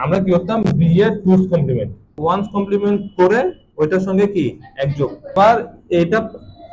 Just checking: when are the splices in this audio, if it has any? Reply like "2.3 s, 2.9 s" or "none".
2.1 s, 5.3 s